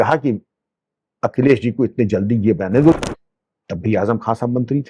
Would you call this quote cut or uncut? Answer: cut